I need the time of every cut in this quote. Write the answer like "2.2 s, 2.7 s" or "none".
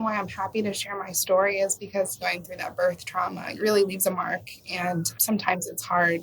2.2 s, 3.5 s, 5.1 s